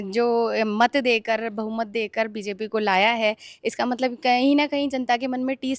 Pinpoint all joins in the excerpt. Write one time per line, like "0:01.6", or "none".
none